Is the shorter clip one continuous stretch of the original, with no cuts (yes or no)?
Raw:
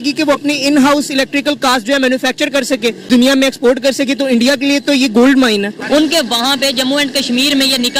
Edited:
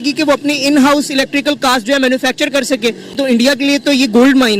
no